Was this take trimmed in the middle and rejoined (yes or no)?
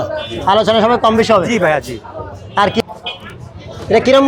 no